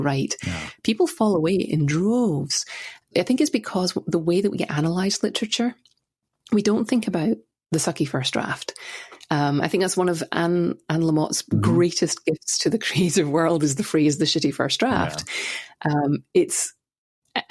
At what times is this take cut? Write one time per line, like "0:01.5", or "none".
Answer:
0:03.1